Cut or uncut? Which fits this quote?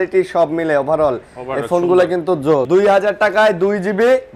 cut